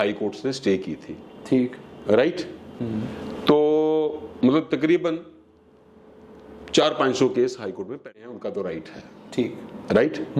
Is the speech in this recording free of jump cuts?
no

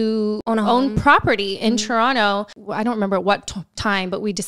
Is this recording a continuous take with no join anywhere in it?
no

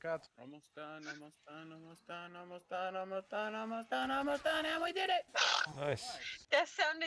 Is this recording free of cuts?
yes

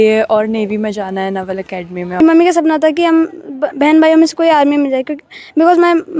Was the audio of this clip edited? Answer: yes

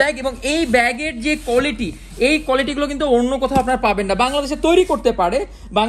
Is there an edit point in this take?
no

